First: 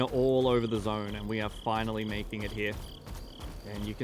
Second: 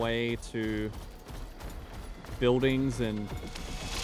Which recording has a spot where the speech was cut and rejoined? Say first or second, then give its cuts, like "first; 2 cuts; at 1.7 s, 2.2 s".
first; 1 cut; at 2.8 s